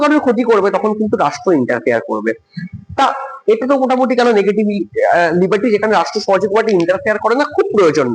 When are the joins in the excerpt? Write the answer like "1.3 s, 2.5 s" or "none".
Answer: none